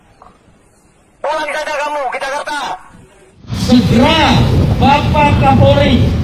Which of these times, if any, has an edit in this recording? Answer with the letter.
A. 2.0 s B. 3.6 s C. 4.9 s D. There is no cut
B